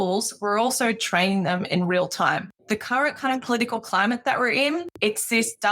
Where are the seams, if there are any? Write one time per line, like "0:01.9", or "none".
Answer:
0:02.5
0:04.9